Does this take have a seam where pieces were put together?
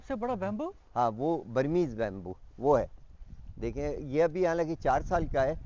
no; 0 cuts

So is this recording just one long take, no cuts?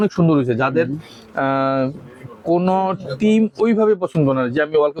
yes; 0 cuts

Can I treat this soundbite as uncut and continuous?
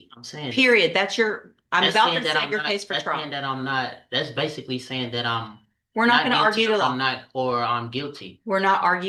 yes; 0 cuts

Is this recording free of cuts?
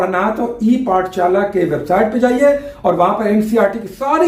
yes; 0 cuts

